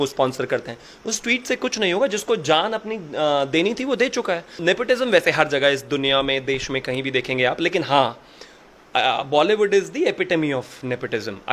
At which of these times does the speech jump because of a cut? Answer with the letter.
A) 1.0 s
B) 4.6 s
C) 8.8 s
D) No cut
B